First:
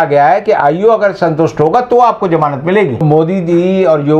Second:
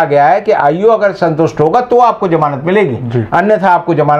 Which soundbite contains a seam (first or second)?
first